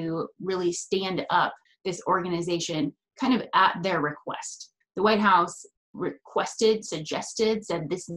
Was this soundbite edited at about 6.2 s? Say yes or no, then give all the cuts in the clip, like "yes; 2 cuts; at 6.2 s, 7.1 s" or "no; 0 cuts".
no; 2 cuts; at 1.7 s, 4.7 s